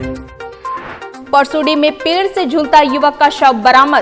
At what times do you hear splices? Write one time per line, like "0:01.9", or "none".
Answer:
0:01.1